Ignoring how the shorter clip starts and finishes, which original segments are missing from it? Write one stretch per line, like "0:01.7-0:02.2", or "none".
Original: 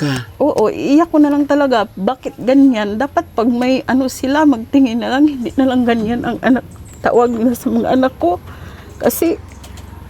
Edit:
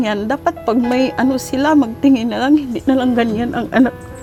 none

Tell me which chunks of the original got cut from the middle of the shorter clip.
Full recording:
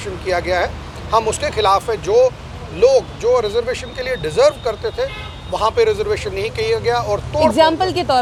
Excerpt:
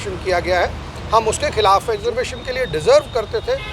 0:02.0-0:03.5

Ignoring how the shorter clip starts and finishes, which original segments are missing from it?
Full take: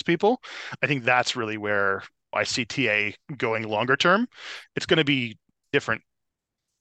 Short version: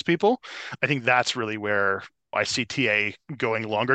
none

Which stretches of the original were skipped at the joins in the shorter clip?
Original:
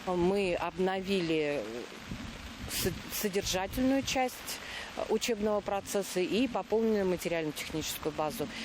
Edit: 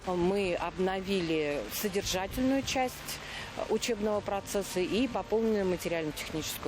0:01.7-0:03.1

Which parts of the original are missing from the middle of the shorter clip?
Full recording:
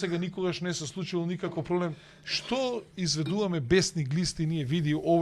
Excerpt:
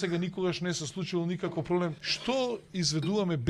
0:02.1-0:02.3

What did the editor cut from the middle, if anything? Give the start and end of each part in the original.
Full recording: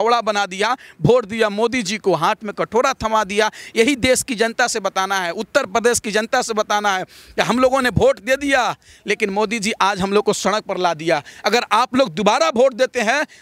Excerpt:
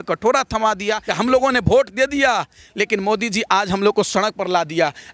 0:03.5-0:07.3

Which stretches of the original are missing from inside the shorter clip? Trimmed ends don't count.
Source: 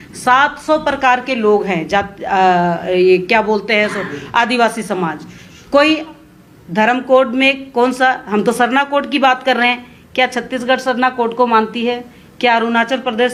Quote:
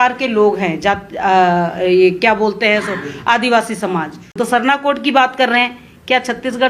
0:05.5-0:08.5

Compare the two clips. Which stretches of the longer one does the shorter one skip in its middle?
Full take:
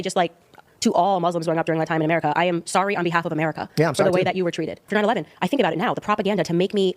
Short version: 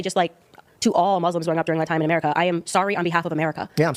none

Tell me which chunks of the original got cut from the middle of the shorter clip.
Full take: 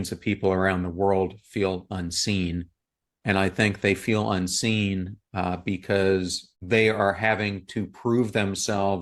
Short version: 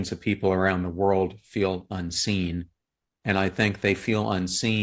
none

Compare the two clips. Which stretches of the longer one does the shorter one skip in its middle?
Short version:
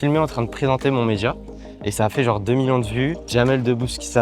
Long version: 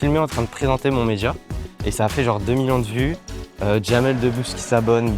0:03.3-0:03.8

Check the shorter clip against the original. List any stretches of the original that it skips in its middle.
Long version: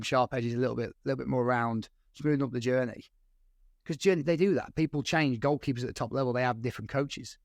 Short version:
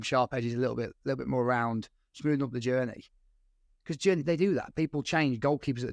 none

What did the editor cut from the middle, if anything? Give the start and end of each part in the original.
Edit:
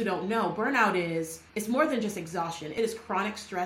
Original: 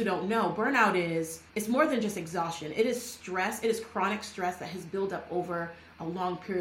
0:02.7-0:03.6

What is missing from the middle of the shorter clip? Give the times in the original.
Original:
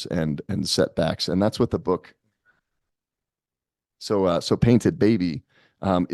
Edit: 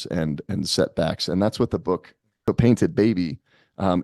0:02.4-0:04.4

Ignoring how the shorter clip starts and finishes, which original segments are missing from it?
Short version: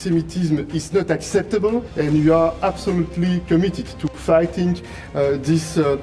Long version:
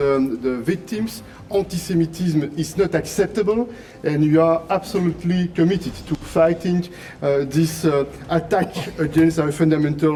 0:03.7-0:04.0

